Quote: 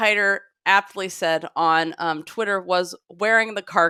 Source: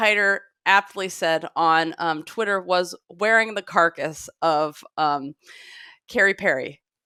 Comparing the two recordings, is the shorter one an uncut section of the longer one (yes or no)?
yes